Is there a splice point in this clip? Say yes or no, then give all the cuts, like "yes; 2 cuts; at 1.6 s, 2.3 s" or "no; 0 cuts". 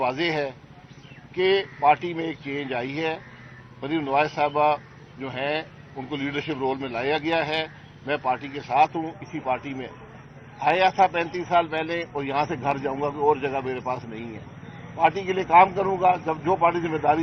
no; 0 cuts